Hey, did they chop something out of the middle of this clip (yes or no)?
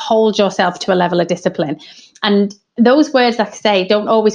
no